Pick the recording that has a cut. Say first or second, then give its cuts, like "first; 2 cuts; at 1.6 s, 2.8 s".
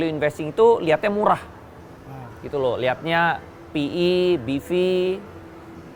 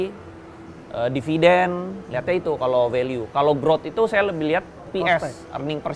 second; 1 cut; at 4.8 s